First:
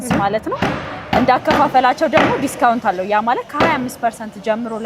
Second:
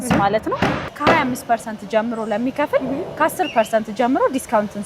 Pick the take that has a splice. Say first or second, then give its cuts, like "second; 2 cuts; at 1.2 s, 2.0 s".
second; 1 cut; at 0.9 s